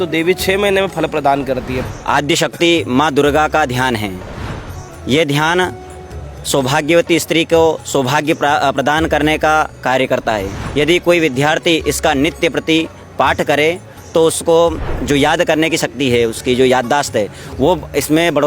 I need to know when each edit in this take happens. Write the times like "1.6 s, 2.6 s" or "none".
1.7 s, 10.6 s, 14.9 s